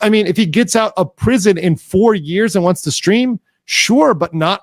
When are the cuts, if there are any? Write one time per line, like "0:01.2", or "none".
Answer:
none